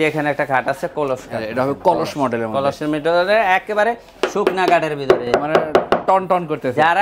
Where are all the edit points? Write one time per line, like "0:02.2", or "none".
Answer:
none